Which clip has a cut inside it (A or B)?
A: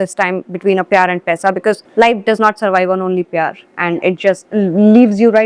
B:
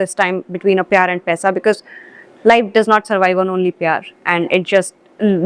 A